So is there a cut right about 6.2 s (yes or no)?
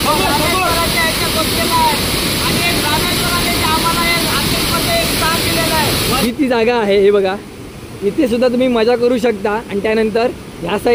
yes